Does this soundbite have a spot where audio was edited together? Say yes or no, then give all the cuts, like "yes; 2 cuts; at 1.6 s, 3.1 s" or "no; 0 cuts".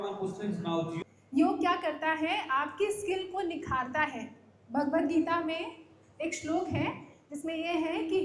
yes; 1 cut; at 1.0 s